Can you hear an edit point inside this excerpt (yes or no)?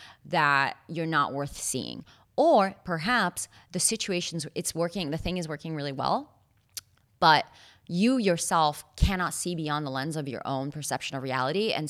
no